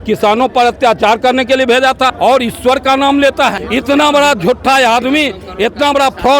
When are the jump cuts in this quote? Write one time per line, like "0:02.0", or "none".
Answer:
0:02.1
0:03.6